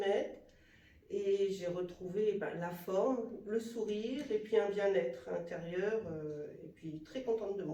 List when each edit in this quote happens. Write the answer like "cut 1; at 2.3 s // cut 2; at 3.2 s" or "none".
none